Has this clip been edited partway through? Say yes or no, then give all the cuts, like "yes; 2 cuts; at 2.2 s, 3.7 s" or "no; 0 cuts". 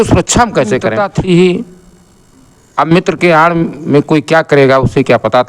yes; 1 cut; at 1.0 s